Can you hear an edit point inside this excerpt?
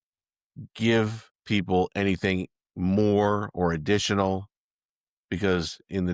yes; 1 cut; at 1.3 s

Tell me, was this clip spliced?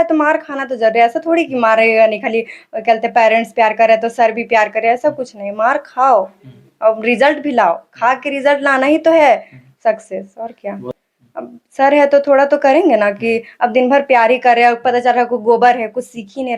yes; 1 cut; at 10.9 s

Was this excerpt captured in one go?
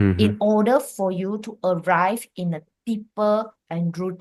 yes; 0 cuts

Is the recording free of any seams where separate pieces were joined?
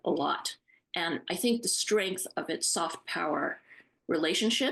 yes; 0 cuts

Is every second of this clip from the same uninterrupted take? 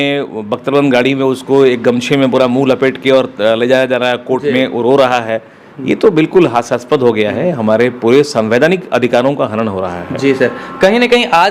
yes; 0 cuts

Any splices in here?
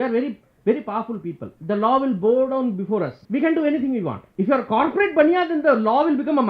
yes; 3 cuts; at 1.5 s, 3.2 s, 4.2 s

